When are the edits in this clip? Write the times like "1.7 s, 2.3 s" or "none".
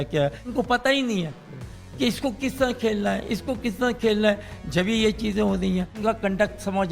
0.8 s, 6.0 s

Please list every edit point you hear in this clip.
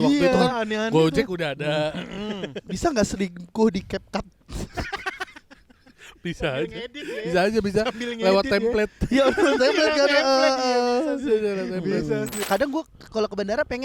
12.4 s

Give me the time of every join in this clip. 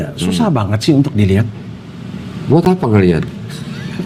none

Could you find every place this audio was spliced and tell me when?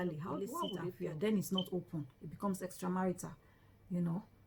0.9 s

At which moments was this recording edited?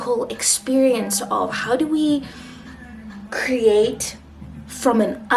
none

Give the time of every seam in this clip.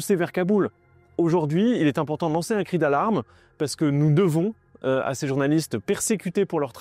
1.1 s

